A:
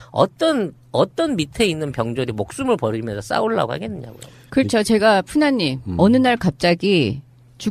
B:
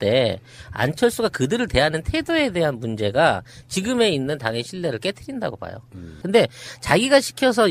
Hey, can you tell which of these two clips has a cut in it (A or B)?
A